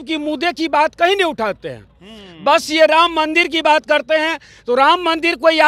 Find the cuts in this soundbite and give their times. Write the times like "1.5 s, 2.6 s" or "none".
none